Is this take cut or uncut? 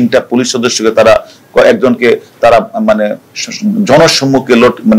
uncut